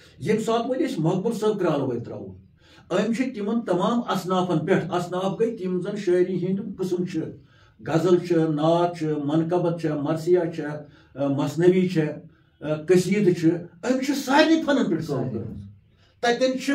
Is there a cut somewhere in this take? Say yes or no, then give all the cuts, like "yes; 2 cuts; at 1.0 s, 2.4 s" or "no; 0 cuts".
no; 0 cuts